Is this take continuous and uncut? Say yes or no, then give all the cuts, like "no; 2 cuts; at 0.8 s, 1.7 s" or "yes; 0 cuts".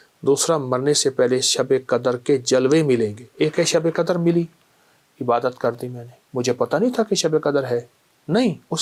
yes; 0 cuts